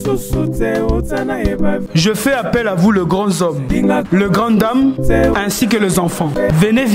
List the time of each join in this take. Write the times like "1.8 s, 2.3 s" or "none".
1.8 s